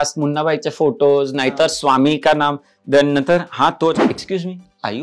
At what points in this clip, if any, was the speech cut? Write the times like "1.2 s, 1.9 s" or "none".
none